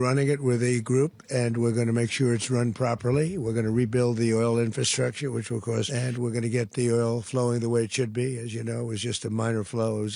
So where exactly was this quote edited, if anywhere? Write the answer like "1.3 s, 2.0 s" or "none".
5.9 s

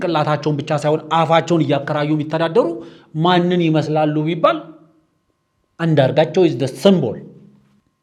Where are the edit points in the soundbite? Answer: none

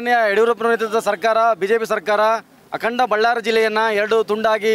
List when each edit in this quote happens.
none

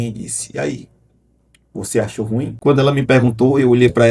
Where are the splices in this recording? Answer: 2.5 s

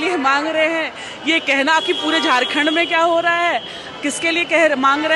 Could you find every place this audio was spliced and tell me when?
none

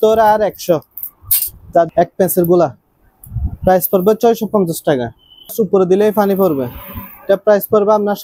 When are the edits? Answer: 1.9 s, 5.5 s

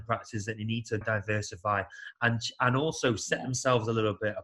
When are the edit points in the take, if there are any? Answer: 1.0 s

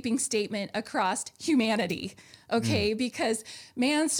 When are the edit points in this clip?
none

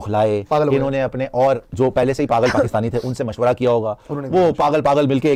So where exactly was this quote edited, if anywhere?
none

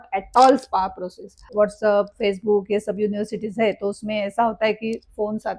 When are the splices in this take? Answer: 1.4 s

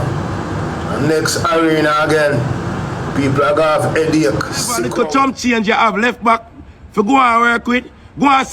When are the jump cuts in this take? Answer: 4.9 s

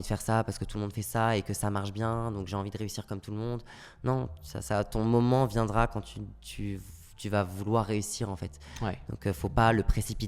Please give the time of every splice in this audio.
none

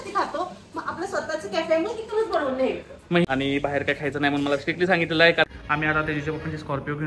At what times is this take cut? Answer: 3.2 s, 5.5 s

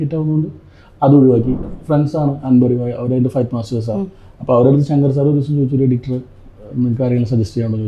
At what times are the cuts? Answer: 1.7 s

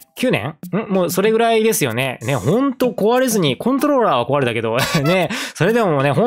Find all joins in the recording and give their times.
none

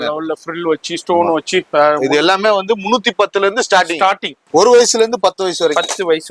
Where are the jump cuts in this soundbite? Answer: 4.3 s

